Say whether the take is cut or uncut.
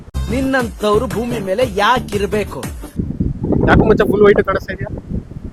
uncut